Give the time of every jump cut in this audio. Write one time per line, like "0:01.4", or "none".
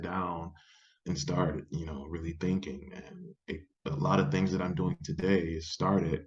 none